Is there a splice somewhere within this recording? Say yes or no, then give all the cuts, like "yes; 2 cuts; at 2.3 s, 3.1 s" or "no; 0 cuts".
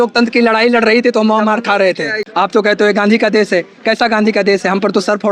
yes; 1 cut; at 2.2 s